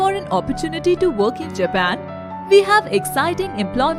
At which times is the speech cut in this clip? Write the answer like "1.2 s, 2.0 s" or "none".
none